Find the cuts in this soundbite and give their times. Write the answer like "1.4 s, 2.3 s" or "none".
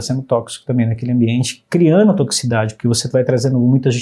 none